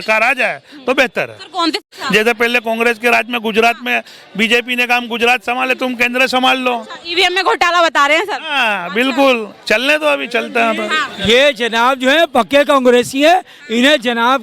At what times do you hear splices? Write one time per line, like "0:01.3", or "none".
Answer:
0:01.8